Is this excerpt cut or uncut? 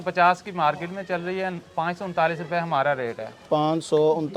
uncut